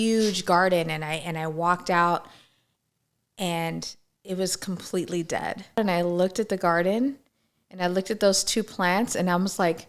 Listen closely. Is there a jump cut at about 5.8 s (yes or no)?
yes